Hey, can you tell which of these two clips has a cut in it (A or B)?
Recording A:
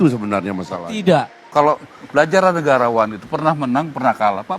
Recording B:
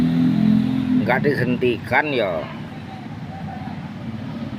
A